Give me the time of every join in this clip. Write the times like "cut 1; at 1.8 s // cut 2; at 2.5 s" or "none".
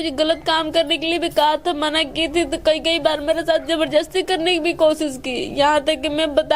none